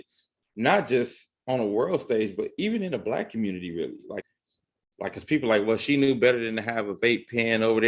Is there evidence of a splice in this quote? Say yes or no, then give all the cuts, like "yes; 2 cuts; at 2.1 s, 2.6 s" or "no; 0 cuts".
yes; 1 cut; at 4.2 s